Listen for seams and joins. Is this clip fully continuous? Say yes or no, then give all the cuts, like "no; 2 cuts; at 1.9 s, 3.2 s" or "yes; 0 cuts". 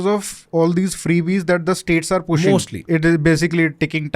no; 1 cut; at 2.9 s